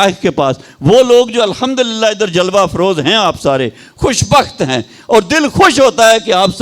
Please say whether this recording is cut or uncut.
uncut